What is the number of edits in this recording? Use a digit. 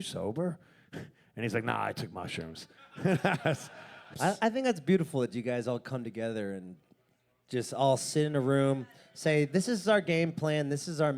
1